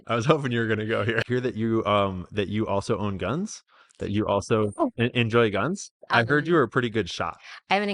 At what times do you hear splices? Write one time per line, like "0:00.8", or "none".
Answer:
0:01.2
0:06.1